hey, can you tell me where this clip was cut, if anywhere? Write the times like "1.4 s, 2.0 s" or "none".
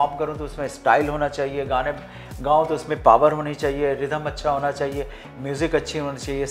none